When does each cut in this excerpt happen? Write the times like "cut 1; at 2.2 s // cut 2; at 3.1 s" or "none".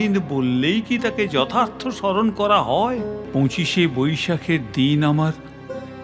cut 1; at 3.2 s